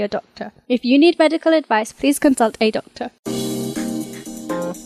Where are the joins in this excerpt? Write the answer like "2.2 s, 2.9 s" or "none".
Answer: none